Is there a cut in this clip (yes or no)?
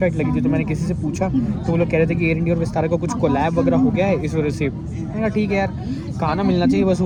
no